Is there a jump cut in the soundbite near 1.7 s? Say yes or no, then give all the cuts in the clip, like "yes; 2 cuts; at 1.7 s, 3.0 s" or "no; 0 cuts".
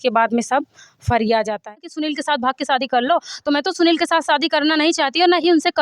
yes; 1 cut; at 1.7 s